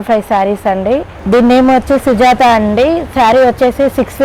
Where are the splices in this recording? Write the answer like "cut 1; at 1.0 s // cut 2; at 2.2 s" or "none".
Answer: cut 1; at 1.1 s